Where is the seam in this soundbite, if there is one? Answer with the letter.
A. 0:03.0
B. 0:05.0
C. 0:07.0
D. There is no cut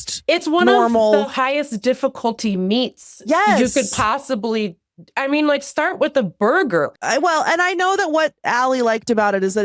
C